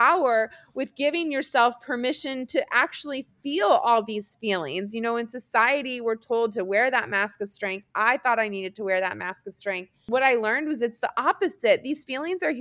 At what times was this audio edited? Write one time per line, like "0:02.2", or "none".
0:10.0